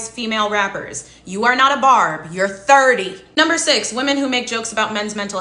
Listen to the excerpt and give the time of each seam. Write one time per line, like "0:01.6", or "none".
0:03.9